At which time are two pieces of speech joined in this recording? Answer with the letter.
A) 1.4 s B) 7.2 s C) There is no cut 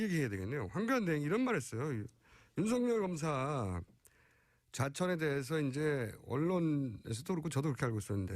B